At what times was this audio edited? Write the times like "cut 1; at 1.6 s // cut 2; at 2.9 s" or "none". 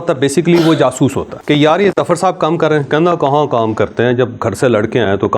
cut 1; at 1.3 s